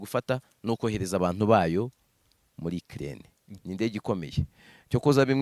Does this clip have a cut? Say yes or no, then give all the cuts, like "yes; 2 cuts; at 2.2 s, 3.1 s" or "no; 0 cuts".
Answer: yes; 1 cut; at 3.5 s